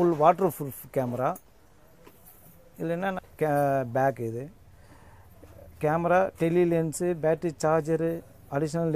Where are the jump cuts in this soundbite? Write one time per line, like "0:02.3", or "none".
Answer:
0:03.2